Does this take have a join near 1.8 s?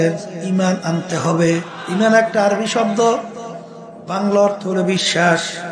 yes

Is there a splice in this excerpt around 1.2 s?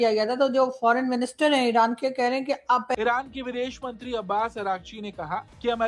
no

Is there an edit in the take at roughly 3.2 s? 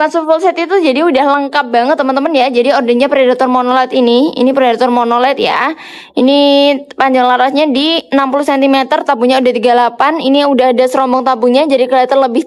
no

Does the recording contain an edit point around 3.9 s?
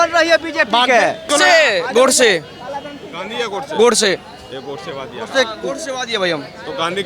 no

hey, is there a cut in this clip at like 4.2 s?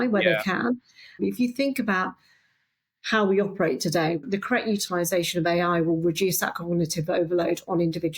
yes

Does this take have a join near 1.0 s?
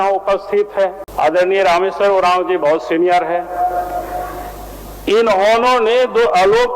yes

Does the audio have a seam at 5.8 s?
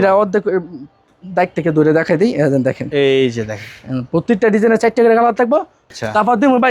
yes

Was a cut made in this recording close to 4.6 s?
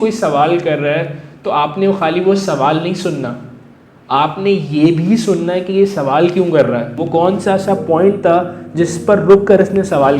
no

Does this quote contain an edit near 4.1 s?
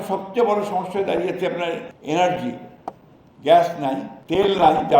yes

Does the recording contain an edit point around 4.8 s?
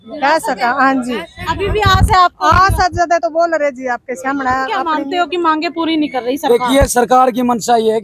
yes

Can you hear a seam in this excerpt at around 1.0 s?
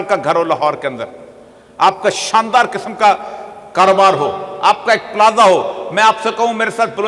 no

